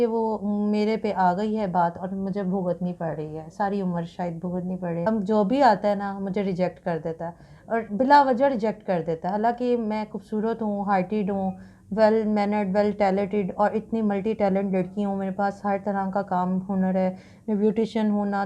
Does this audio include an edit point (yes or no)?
yes